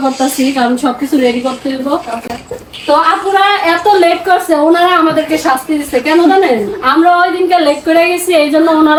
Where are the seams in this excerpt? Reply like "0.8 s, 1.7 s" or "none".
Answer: none